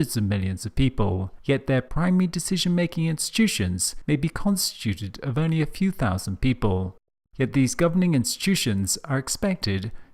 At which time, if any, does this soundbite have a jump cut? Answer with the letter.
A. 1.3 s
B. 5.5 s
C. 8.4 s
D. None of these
B